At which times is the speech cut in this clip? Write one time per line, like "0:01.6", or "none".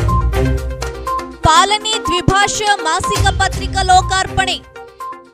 none